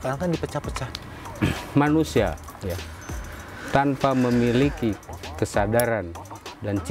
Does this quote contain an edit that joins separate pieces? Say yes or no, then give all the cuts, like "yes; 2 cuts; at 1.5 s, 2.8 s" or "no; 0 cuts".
yes; 1 cut; at 1.2 s